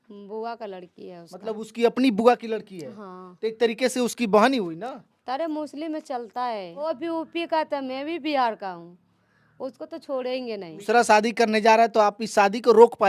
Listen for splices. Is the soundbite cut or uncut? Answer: cut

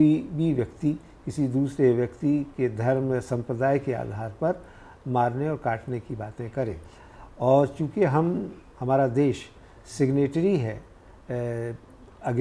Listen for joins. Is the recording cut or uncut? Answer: uncut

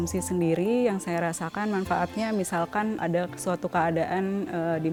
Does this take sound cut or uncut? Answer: uncut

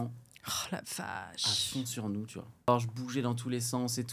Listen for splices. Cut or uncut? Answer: cut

